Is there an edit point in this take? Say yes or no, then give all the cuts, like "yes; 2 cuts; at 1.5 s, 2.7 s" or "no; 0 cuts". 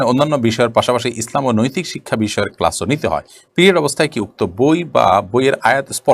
no; 0 cuts